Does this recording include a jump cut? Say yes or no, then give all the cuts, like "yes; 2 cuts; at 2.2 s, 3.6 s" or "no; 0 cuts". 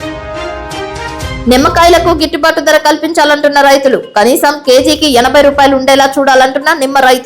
yes; 1 cut; at 1.4 s